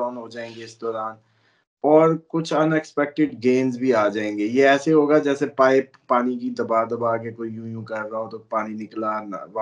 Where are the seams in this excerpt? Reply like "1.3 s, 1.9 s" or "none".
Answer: none